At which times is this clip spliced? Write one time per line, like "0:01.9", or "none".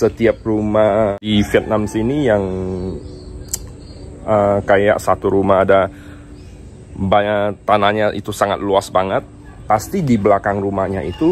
0:01.2